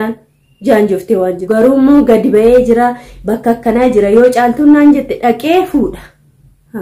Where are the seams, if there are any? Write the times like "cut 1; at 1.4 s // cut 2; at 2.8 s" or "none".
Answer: cut 1; at 1.4 s